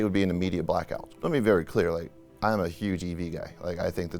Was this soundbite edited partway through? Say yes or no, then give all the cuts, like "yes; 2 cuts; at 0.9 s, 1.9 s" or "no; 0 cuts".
yes; 1 cut; at 1.0 s